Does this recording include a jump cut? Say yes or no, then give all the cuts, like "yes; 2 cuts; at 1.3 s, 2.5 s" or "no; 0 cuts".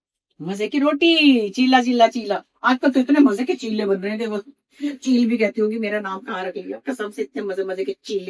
no; 0 cuts